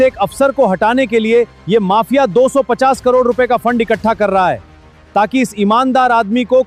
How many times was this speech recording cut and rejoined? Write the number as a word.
zero